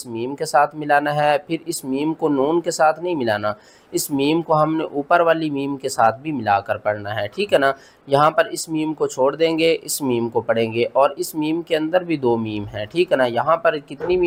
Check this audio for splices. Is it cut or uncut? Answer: uncut